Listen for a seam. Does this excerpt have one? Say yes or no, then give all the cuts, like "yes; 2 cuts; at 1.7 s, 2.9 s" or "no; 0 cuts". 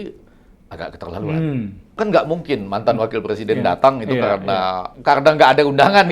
yes; 2 cuts; at 1.9 s, 4.9 s